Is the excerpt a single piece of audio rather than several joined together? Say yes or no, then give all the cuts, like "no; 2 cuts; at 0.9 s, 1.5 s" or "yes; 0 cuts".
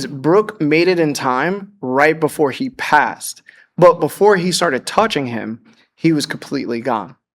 yes; 0 cuts